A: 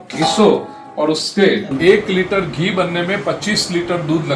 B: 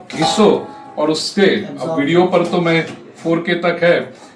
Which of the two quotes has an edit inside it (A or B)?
A